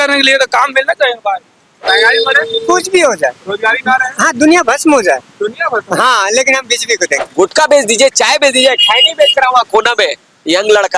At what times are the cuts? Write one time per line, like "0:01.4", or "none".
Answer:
0:01.8
0:07.3